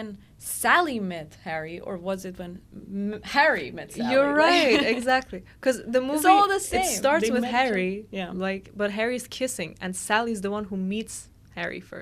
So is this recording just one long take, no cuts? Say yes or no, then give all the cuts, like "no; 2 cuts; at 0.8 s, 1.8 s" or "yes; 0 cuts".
yes; 0 cuts